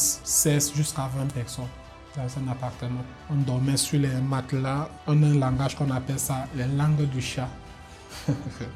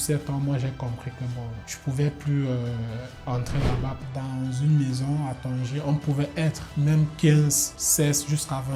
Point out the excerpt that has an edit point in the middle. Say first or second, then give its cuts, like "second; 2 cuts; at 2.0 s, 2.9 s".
second; 1 cut; at 4.1 s